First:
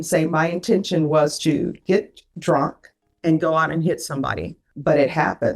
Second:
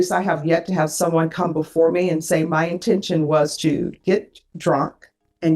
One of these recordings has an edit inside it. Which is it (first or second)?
first